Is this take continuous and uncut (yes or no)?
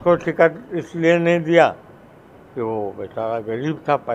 yes